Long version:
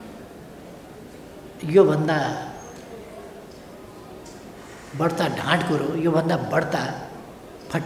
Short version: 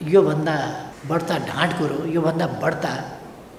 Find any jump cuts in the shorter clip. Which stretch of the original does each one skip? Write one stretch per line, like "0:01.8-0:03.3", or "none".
0:02.5-0:04.8